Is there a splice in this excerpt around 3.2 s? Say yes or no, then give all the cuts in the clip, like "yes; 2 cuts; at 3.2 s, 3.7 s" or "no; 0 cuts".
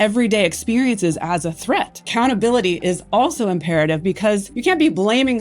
no; 2 cuts; at 2.0 s, 4.5 s